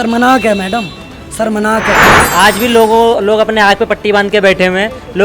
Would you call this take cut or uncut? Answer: cut